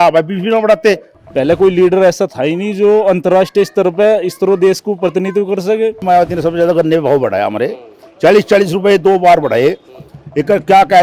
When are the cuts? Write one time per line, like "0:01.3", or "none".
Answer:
0:01.2
0:06.0